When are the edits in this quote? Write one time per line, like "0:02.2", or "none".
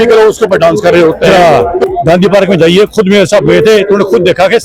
0:01.3